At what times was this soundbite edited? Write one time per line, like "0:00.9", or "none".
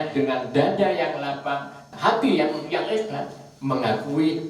0:01.8